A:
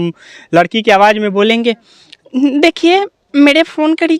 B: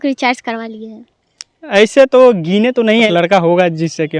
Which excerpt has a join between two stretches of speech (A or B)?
B